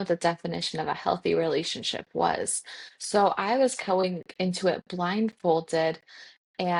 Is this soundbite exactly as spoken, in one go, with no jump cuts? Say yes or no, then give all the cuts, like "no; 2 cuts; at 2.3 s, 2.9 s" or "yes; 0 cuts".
yes; 0 cuts